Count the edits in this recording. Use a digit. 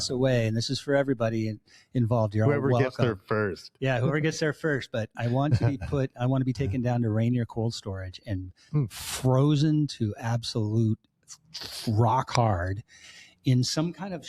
0